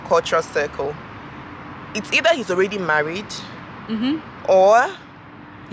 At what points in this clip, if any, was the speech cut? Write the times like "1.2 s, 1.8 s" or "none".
none